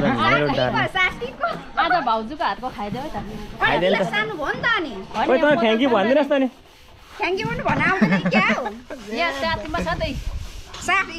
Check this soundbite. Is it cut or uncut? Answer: uncut